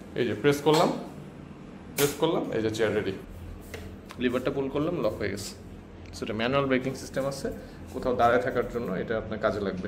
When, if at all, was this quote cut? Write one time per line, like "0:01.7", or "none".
0:03.3